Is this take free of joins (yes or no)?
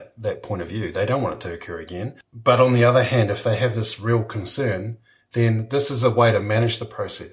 no